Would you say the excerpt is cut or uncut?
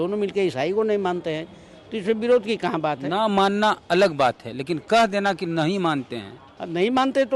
uncut